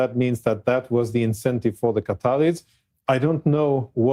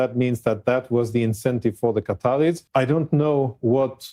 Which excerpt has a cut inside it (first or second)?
second